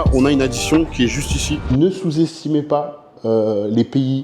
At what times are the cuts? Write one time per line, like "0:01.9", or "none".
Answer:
0:01.7